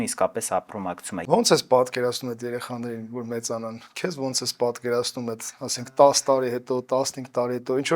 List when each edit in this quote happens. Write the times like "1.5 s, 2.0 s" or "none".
1.1 s